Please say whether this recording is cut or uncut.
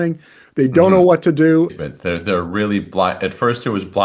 cut